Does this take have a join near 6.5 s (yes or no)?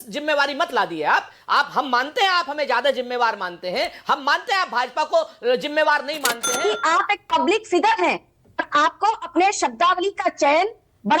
yes